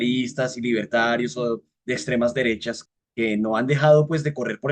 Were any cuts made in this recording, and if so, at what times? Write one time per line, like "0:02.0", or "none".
0:02.7